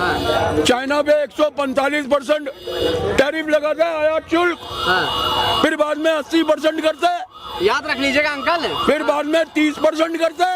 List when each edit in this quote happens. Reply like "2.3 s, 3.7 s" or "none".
none